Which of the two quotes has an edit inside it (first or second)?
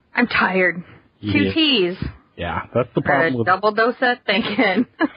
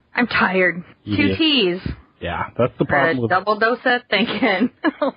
second